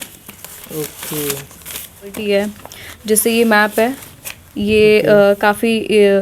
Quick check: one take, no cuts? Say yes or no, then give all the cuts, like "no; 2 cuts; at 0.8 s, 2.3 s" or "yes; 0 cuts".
no; 1 cut; at 2.2 s